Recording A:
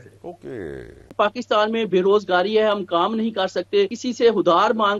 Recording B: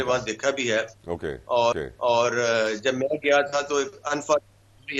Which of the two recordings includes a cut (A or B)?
A